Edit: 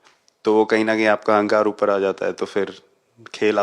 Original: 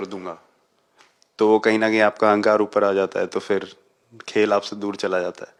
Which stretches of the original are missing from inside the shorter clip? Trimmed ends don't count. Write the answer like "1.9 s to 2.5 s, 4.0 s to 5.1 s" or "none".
none